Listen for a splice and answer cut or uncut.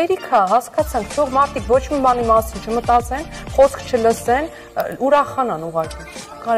uncut